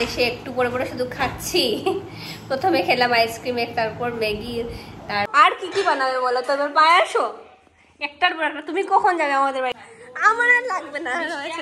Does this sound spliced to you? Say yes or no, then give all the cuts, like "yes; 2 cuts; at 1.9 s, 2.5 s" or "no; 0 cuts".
yes; 2 cuts; at 5.3 s, 9.7 s